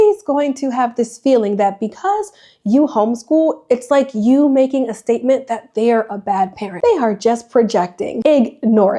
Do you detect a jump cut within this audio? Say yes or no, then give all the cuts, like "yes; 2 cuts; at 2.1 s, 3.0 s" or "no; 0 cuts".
yes; 2 cuts; at 6.6 s, 8.1 s